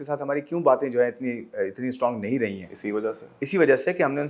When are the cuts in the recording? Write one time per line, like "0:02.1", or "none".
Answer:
none